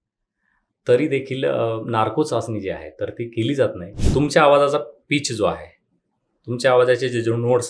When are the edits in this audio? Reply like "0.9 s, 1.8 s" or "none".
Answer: 3.9 s